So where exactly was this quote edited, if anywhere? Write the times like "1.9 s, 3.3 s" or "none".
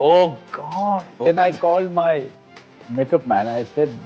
1.1 s